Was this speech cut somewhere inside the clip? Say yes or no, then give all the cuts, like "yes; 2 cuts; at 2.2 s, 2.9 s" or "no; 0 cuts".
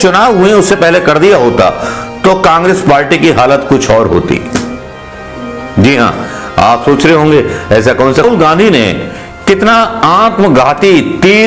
yes; 1 cut; at 8.2 s